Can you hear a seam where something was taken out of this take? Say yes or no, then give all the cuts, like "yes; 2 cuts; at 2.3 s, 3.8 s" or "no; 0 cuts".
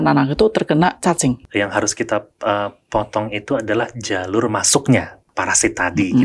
yes; 2 cuts; at 1.4 s, 5.2 s